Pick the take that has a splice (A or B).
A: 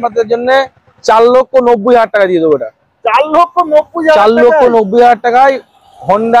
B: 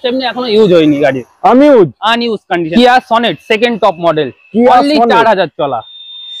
B